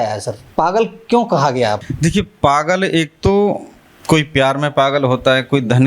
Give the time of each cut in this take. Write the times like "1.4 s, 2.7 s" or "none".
1.9 s